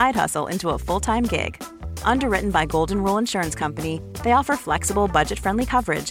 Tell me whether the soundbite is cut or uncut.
uncut